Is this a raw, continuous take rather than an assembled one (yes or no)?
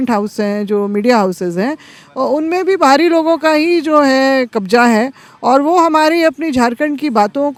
yes